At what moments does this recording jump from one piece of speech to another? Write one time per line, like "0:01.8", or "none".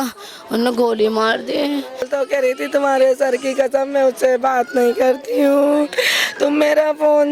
0:02.1